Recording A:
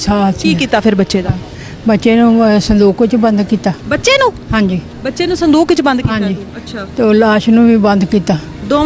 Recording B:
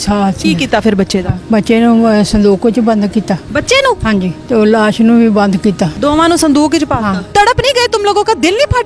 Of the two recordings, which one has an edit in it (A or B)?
B